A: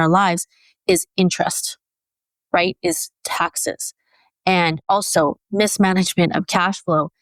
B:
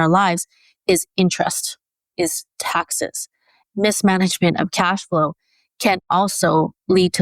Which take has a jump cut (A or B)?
B